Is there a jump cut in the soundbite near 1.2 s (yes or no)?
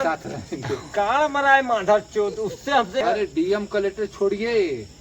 no